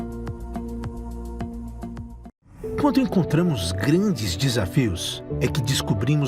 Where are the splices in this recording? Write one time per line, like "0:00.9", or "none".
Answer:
0:02.2